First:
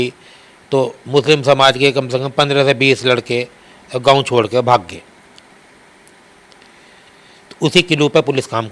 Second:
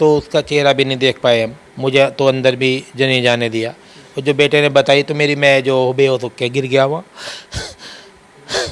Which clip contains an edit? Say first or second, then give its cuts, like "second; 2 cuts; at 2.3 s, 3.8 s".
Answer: second; 1 cut; at 1.6 s